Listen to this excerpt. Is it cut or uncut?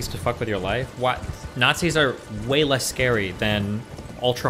uncut